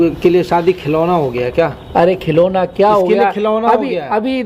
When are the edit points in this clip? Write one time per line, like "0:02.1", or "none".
none